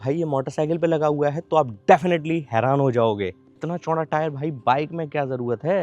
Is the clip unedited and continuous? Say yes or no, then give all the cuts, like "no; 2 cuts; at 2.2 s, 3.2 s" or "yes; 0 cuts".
no; 1 cut; at 3.5 s